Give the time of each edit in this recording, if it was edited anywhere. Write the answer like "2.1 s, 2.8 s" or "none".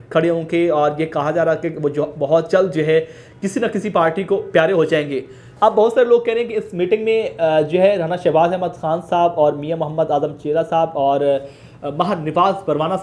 5.5 s